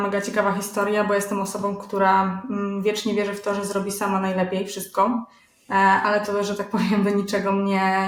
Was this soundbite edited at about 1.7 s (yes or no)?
no